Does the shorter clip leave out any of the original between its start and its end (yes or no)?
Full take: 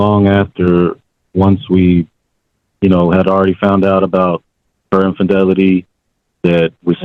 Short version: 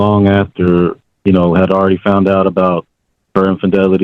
yes